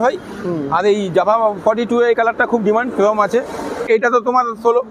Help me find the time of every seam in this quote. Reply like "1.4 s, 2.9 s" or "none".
3.8 s